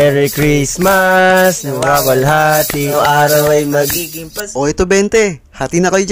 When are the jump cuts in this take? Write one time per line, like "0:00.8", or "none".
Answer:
0:02.9

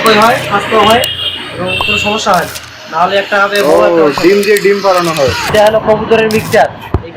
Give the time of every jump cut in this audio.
0:05.5

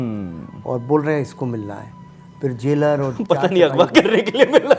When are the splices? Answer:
none

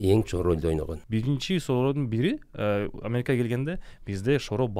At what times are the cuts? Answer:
0:01.0

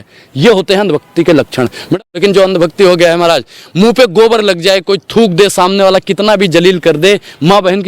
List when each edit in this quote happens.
0:01.8

